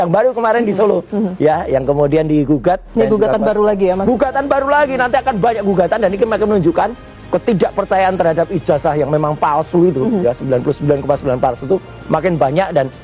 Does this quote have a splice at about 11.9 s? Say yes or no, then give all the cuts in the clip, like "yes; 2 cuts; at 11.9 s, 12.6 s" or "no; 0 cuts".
no; 1 cut; at 2.9 s